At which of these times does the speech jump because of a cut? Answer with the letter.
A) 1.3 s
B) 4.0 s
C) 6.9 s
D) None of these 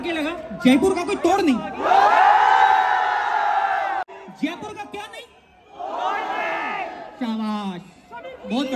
B